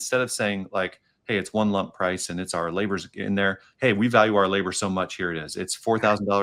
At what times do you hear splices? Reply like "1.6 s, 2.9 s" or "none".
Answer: none